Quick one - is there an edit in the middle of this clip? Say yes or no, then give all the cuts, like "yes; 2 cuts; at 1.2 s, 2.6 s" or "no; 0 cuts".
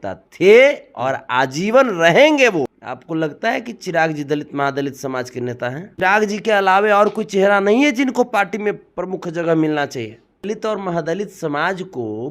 yes; 3 cuts; at 2.7 s, 5.9 s, 10.4 s